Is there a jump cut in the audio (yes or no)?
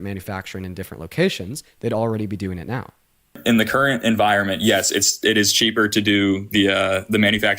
yes